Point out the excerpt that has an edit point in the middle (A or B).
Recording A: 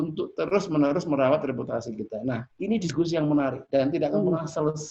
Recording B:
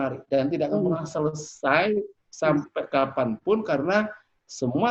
A